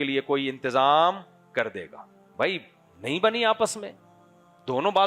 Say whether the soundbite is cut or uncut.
cut